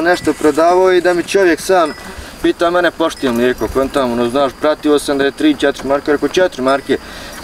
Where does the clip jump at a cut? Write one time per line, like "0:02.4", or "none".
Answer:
none